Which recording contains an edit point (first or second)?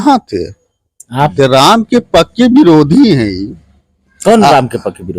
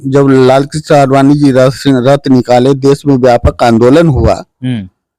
first